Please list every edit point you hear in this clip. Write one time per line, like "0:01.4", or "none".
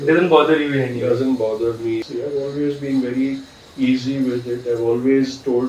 0:02.0